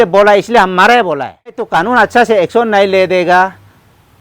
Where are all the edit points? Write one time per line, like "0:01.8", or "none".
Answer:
0:01.7